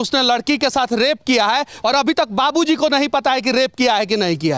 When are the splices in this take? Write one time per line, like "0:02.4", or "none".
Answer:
0:01.8